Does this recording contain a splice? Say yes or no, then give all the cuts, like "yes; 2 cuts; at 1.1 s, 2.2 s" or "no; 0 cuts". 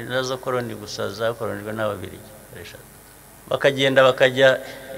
yes; 1 cut; at 3.1 s